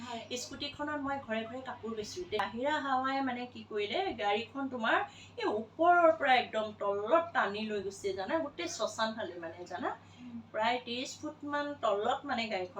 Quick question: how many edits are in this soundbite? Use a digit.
1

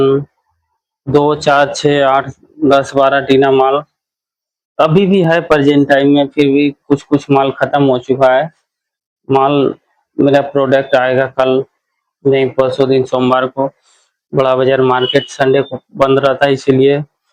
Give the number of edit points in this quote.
0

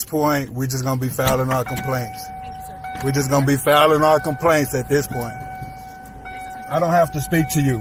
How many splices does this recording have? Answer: 0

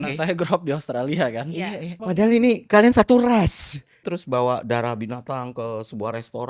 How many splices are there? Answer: 2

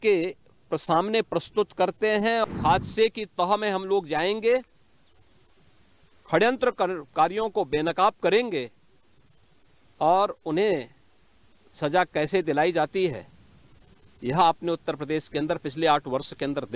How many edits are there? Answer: 1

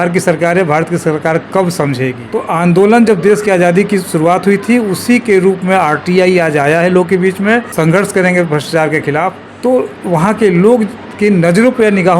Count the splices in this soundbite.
3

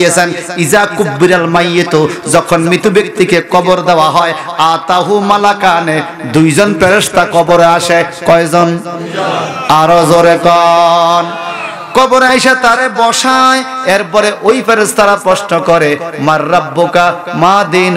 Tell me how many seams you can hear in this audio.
0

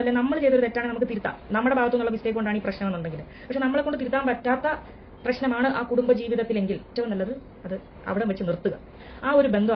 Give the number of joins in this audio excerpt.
1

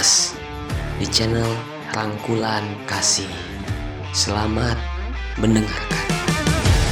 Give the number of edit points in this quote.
0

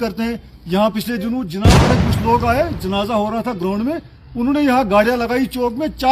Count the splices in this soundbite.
1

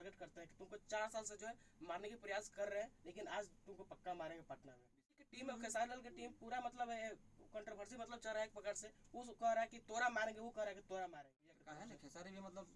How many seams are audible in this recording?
2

